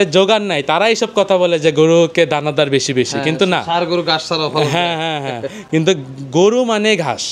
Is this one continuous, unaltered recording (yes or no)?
yes